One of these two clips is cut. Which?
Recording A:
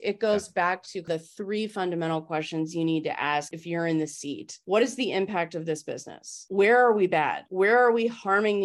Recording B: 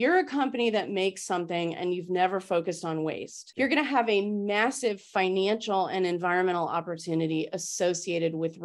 A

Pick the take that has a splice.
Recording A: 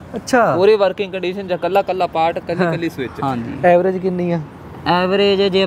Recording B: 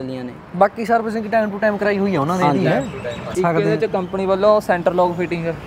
B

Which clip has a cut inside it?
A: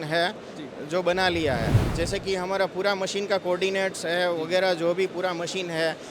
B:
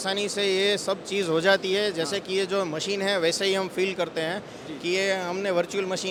A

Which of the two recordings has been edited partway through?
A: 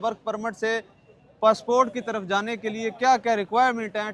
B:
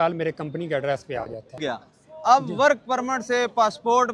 B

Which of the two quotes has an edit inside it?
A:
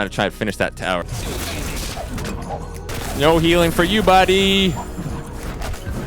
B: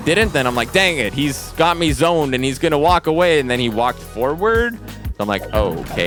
A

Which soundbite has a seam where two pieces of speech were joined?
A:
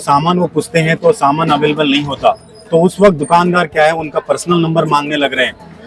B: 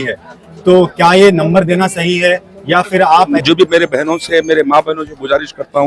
B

